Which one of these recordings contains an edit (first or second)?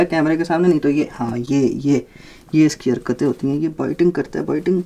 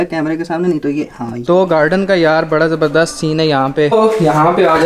second